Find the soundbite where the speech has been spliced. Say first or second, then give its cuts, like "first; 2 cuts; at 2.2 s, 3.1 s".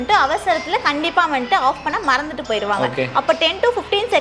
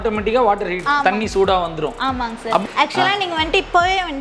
second; 2 cuts; at 0.8 s, 2.6 s